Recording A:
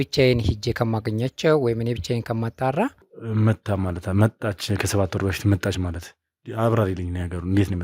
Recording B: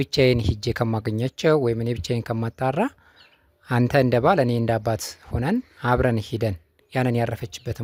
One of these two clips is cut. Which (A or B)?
A